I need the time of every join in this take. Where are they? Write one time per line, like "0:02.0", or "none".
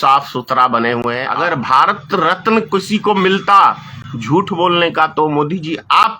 0:01.3